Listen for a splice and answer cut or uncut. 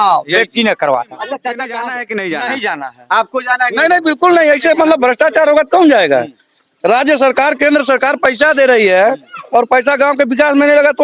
cut